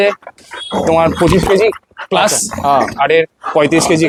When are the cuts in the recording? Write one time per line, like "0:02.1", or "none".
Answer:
none